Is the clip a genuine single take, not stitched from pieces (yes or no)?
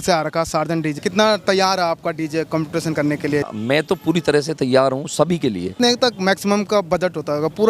no